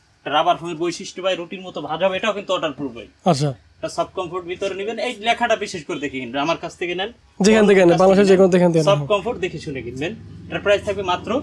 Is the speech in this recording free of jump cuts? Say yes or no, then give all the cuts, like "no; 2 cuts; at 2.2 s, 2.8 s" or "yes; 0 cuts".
yes; 0 cuts